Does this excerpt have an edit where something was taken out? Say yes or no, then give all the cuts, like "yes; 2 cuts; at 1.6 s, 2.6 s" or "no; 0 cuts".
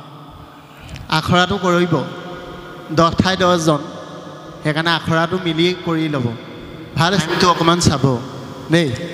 yes; 1 cut; at 7.2 s